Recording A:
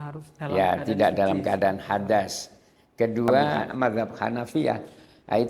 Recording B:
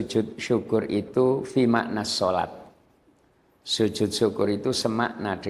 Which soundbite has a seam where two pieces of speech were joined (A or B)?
A